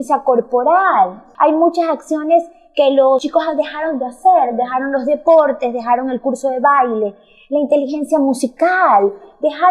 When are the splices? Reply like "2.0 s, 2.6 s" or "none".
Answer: 1.2 s